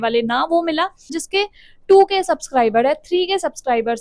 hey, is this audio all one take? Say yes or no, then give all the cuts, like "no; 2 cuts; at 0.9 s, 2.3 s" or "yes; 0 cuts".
no; 1 cut; at 1.2 s